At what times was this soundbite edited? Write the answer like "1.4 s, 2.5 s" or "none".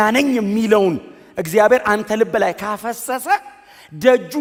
none